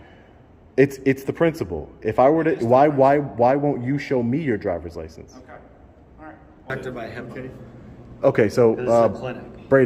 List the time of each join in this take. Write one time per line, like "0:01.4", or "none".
0:06.7